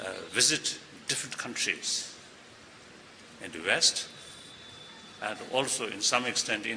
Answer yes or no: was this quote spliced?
no